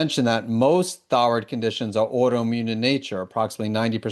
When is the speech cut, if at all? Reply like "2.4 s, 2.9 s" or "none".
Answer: none